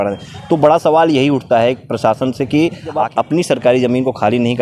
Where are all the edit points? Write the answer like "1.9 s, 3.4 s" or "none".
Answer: 3.2 s